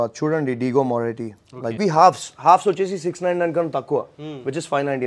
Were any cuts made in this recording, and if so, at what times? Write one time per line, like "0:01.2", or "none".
0:01.8

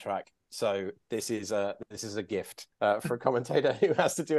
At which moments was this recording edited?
0:02.6

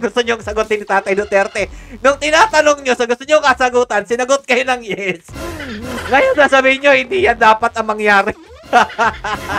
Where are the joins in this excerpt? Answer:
none

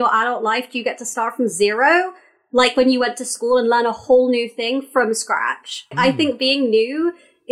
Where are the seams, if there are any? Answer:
0:05.9

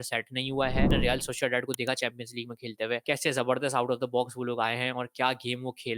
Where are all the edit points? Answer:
0:00.9
0:03.0

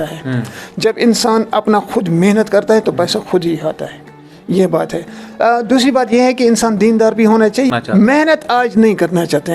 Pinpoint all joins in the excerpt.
0:07.7

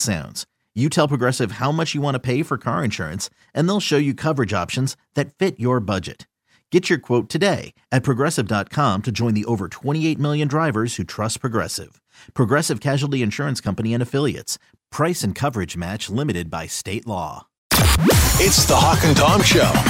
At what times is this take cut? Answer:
0:17.6

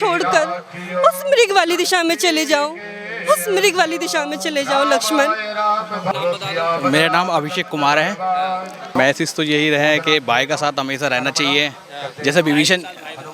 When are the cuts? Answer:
none

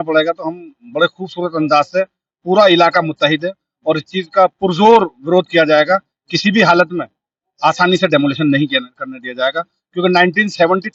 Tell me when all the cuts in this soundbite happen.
none

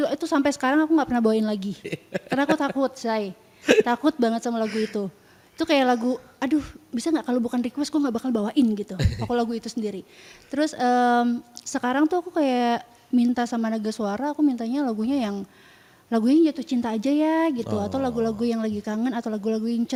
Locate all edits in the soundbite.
none

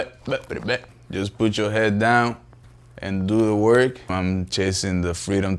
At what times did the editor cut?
0:01.0
0:04.1

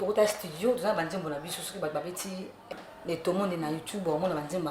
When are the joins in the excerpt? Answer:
0:02.7

